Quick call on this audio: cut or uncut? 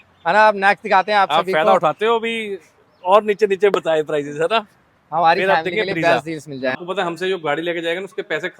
cut